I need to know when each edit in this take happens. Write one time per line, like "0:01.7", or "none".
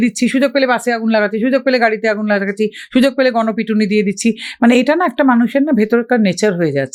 none